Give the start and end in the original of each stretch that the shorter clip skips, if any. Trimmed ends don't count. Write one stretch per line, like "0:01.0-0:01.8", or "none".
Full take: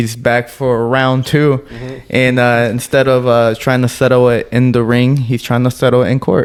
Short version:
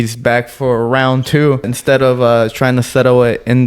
0:01.7-0:02.8